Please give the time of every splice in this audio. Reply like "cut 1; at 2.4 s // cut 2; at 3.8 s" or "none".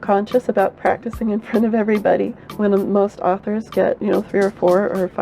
cut 1; at 2.4 s // cut 2; at 4.0 s